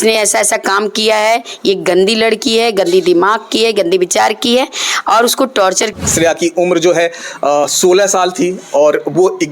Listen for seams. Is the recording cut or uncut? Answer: cut